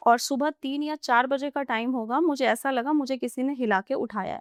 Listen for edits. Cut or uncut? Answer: uncut